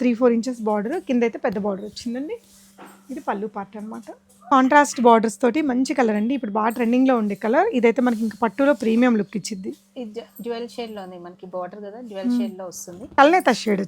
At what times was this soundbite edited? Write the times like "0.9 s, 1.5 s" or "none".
4.5 s, 13.1 s